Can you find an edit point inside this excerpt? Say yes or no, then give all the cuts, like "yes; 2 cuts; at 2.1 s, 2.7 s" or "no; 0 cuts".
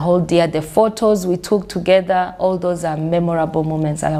no; 0 cuts